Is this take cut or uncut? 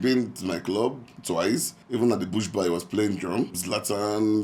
cut